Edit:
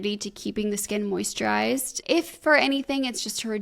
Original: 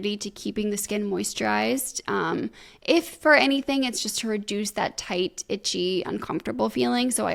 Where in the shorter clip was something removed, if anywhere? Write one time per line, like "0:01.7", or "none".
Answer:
0:01.9